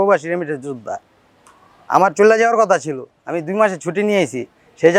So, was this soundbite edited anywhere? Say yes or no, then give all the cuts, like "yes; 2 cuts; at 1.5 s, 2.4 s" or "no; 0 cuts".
no; 0 cuts